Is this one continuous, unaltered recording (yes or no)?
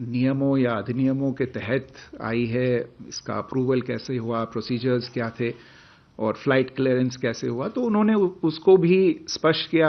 yes